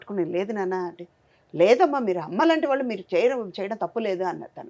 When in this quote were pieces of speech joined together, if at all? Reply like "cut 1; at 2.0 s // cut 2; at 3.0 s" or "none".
none